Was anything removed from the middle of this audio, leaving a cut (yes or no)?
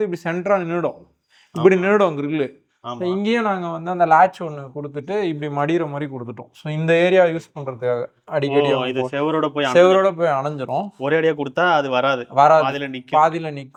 no